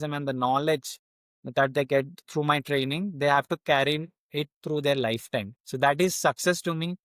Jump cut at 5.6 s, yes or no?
yes